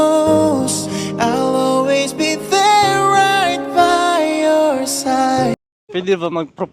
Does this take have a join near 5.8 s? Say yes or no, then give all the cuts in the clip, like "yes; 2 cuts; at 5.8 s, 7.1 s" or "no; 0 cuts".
yes; 2 cuts; at 1.1 s, 5.8 s